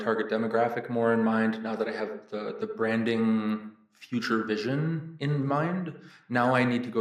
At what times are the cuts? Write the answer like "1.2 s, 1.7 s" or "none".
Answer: none